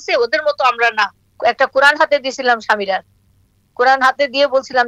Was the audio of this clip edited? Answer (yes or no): yes